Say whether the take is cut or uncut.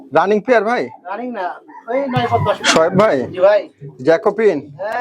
cut